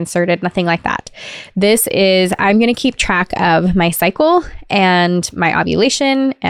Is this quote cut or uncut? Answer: uncut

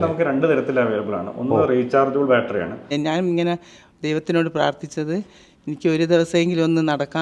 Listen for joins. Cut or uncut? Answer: cut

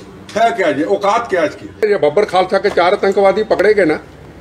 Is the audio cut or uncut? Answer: cut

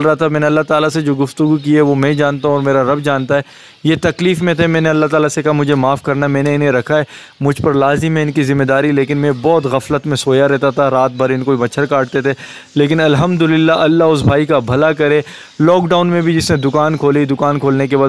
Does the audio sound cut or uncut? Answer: uncut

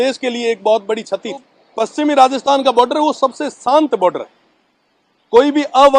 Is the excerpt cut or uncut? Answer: cut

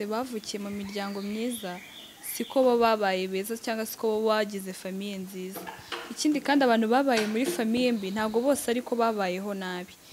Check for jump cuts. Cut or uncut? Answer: uncut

